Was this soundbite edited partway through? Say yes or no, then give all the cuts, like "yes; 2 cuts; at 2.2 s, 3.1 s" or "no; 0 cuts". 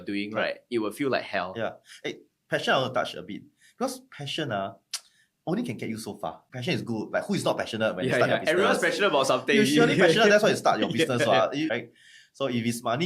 yes; 2 cuts; at 6.5 s, 11.7 s